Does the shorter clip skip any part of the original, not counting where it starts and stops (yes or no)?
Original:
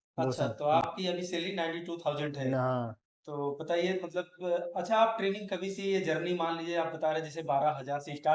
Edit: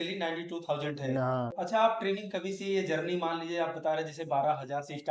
yes